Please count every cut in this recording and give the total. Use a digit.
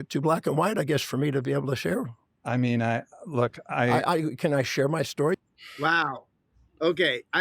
1